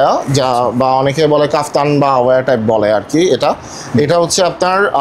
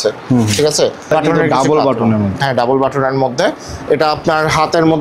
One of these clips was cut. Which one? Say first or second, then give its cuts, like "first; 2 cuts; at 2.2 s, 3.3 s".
second; 1 cut; at 1.1 s